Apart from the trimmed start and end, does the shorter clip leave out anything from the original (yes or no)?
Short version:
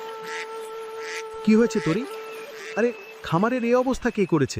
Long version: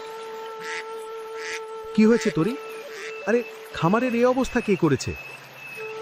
yes